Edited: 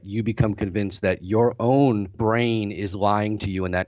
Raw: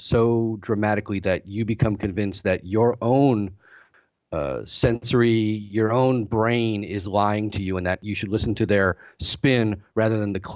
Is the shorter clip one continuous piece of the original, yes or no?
no